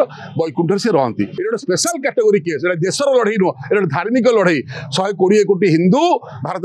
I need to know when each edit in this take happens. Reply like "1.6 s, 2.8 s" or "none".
1.4 s